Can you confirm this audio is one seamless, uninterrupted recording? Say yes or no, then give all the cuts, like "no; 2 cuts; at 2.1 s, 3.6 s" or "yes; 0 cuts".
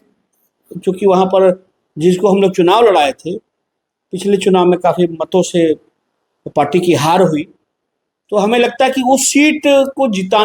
yes; 0 cuts